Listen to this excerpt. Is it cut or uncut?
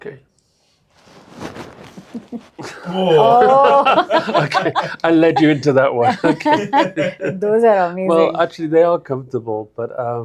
uncut